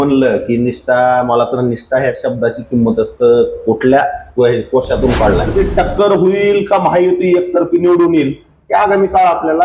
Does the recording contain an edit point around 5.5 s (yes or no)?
yes